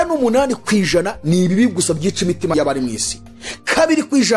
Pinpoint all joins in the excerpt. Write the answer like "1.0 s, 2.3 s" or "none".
2.5 s